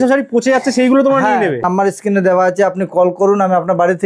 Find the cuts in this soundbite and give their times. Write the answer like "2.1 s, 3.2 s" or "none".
1.6 s